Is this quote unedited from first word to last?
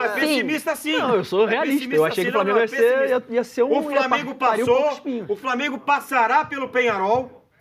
yes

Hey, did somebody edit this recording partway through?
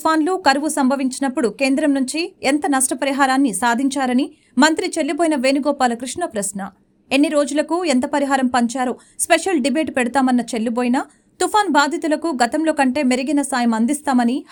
no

